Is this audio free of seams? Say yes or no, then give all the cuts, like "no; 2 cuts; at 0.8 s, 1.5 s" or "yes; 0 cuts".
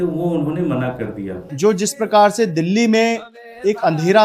no; 1 cut; at 1.4 s